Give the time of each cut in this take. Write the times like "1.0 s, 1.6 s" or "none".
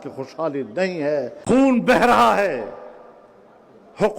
0.9 s